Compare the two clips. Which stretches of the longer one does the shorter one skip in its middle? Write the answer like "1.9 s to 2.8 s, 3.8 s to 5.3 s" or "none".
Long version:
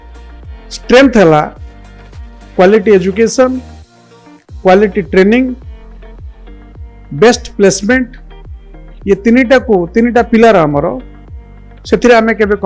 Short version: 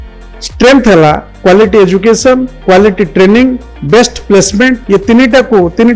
1.6 s to 2.4 s, 3.7 s to 4.5 s, 5.7 s to 7.0 s, 8.1 s to 9.0 s